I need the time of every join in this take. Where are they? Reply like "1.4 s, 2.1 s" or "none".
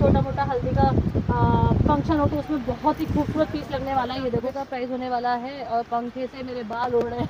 4.6 s